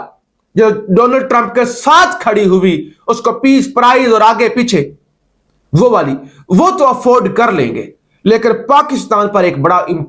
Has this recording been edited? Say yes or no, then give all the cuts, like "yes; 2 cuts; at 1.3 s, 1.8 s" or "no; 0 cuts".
no; 0 cuts